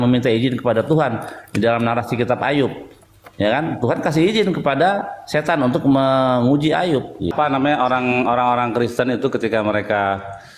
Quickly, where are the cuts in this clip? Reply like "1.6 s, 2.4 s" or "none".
7.2 s